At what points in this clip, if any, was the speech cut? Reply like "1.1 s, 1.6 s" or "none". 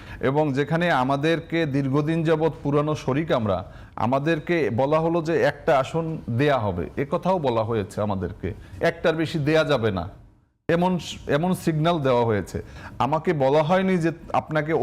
none